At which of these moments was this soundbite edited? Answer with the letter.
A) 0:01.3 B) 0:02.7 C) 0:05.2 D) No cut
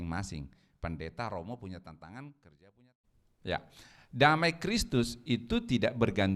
B